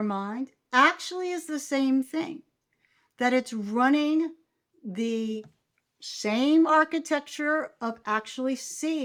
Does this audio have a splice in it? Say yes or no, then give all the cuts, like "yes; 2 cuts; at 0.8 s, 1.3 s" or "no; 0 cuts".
no; 0 cuts